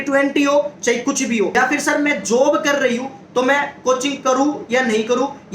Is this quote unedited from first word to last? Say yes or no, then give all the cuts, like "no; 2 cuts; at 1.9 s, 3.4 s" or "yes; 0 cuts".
no; 1 cut; at 1.6 s